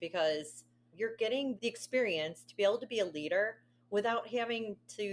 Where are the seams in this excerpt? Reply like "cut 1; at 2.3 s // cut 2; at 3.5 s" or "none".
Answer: cut 1; at 0.9 s // cut 2; at 1.6 s